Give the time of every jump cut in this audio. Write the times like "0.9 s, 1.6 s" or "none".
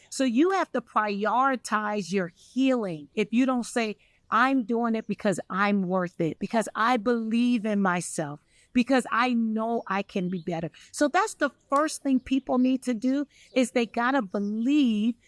3.0 s, 6.4 s

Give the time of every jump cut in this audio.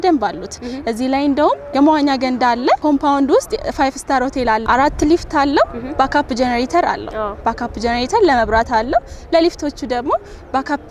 1.7 s, 2.8 s, 4.6 s

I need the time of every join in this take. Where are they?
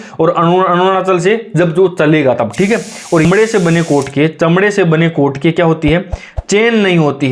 3.2 s

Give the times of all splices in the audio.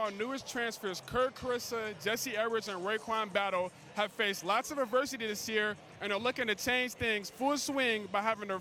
none

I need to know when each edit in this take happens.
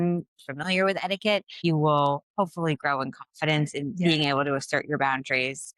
1.5 s

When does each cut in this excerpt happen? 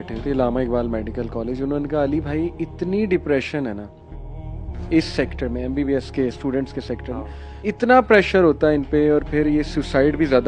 none

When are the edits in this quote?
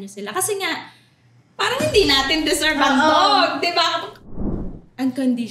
4.3 s

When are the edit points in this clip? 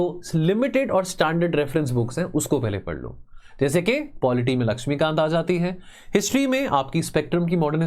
none

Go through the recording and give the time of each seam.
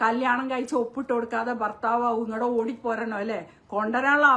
none

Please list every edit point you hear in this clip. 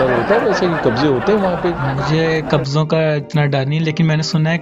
1.9 s

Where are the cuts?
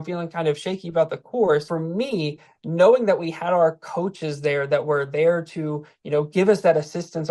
1.7 s

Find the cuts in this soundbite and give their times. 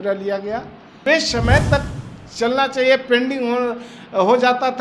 1.0 s

